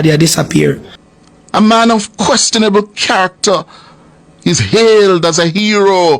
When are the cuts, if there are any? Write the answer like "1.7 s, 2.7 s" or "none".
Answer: 0.9 s